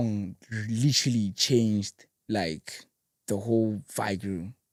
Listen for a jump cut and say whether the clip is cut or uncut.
uncut